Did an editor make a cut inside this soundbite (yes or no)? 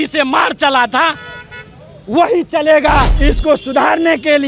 yes